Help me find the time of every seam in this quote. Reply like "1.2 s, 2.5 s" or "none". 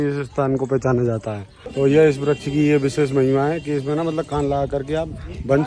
1.5 s